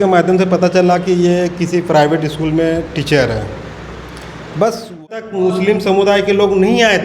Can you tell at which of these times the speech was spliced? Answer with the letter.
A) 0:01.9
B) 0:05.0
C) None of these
B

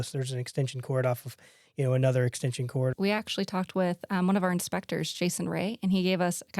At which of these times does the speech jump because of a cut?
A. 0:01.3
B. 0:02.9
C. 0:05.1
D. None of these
B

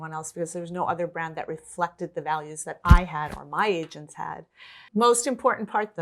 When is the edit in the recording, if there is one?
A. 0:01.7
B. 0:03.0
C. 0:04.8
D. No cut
C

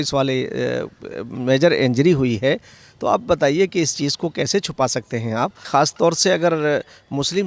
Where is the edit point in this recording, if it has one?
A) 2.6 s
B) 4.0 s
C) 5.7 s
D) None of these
C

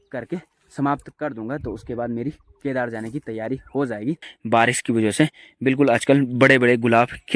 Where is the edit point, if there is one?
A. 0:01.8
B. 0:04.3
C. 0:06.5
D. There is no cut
B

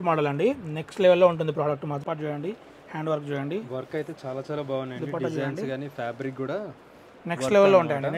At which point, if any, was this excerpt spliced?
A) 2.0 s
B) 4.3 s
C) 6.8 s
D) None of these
A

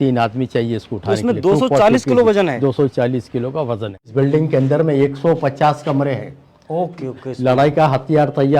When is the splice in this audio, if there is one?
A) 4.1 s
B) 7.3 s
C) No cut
A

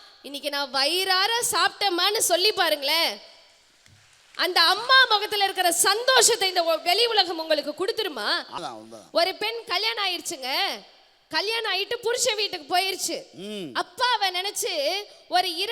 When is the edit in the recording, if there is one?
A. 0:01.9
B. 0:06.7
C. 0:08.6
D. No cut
C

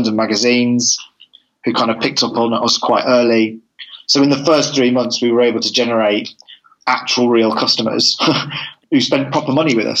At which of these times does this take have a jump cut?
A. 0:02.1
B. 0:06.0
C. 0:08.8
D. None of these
C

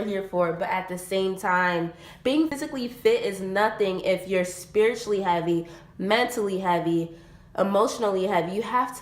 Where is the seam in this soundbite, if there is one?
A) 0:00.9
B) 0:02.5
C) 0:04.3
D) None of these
B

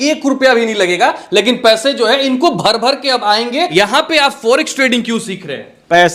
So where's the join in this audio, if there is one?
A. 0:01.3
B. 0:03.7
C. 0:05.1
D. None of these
B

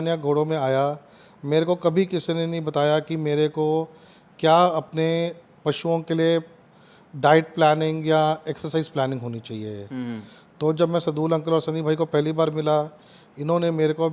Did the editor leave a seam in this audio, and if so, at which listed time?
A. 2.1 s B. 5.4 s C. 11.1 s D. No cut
D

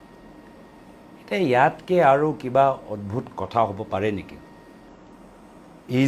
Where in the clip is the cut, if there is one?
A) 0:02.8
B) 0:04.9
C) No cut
B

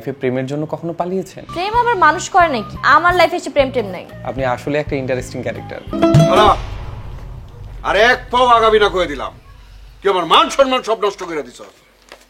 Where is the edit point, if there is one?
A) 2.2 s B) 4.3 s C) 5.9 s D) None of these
C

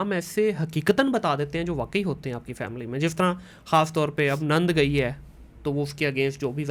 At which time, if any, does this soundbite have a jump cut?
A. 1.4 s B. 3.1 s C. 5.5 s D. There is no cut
D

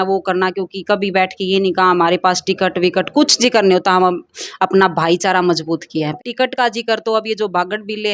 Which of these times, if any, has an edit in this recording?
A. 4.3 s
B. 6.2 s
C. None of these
B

